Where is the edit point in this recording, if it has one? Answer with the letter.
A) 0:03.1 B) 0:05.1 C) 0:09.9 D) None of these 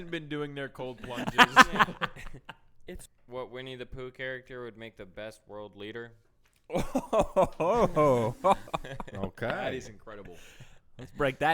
A